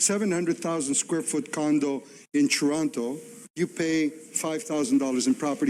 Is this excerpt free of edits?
no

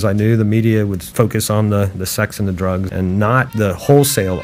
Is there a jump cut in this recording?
yes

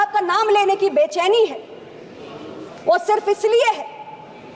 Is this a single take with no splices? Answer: yes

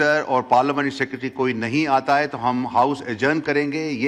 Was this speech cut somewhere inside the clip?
no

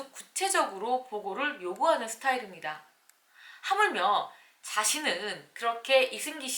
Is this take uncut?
yes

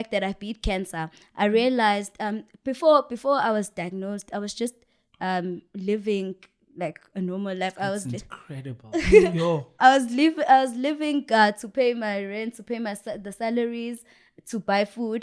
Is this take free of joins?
yes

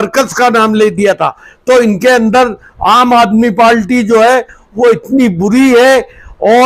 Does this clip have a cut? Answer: no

